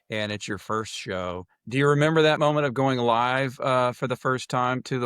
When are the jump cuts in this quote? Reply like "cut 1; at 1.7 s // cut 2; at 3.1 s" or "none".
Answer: cut 1; at 2.4 s